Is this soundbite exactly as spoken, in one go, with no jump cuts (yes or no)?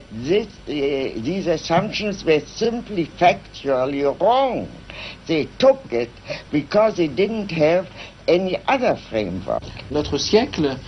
no